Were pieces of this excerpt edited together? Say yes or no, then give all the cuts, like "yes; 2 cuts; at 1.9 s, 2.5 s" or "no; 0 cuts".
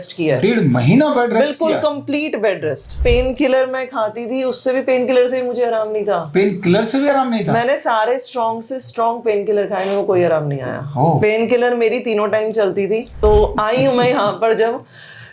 yes; 2 cuts; at 2.9 s, 13.1 s